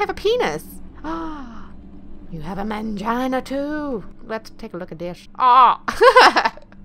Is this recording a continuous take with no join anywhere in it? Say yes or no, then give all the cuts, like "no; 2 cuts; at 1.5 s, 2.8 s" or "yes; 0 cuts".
no; 2 cuts; at 4.1 s, 5.2 s